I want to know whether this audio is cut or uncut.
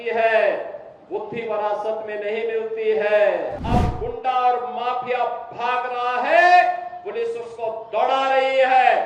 cut